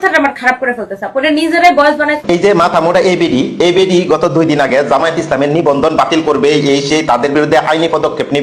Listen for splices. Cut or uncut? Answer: cut